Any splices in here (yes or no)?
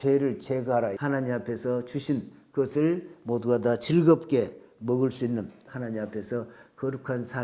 yes